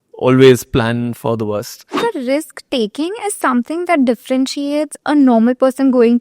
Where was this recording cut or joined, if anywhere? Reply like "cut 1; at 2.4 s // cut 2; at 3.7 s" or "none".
cut 1; at 2.0 s